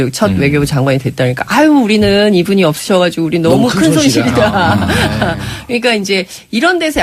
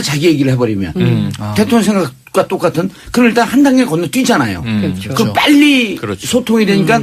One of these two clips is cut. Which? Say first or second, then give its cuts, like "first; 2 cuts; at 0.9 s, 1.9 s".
second; 1 cut; at 4.0 s